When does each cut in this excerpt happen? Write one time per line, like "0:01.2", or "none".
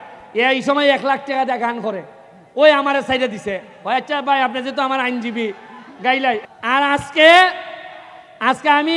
0:06.4